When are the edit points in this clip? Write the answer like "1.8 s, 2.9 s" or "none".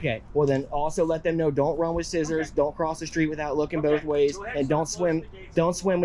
none

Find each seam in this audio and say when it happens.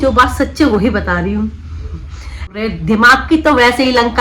2.5 s

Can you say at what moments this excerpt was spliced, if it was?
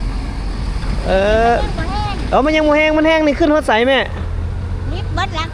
none

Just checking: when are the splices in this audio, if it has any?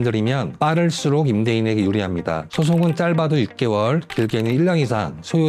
2.5 s

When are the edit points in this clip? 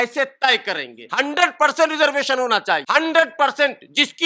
1.0 s, 2.8 s

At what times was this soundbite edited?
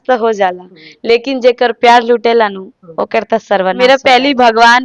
3.8 s

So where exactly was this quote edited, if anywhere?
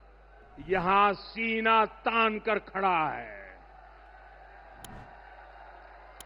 none

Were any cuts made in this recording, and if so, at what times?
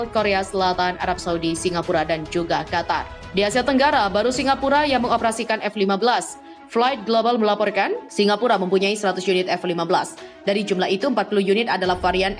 3.2 s, 8.0 s

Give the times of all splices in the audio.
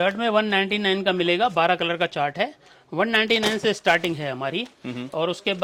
none

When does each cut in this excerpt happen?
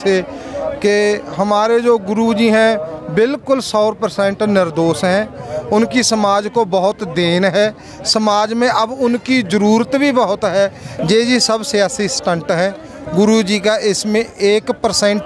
10.9 s

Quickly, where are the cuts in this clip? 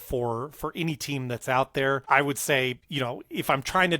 2.0 s, 2.8 s

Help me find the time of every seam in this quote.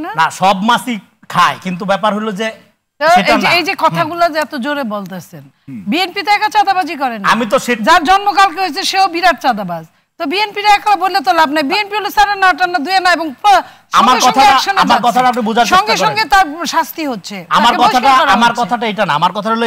none

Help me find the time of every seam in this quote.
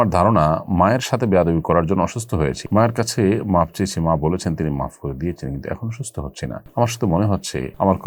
none

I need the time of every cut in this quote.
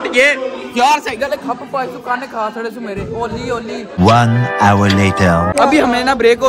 none

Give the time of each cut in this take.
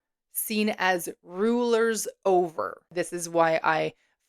2.8 s

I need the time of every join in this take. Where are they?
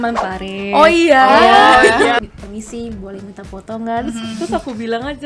2.2 s

